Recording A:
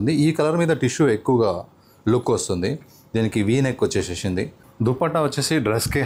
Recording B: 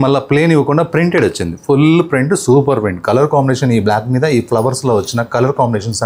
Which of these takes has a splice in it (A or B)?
A